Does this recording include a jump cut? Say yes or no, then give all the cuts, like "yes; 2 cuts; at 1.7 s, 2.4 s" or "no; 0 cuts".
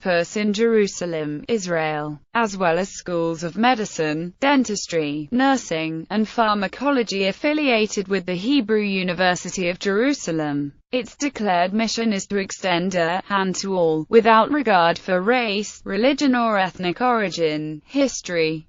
yes; 1 cut; at 16.7 s